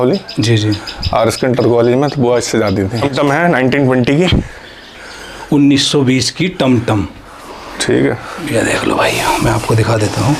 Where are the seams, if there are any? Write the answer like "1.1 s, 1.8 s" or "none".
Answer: 3.0 s